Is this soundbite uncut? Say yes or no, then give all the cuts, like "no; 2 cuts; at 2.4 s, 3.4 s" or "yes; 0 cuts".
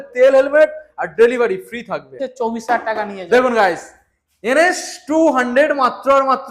no; 1 cut; at 2.2 s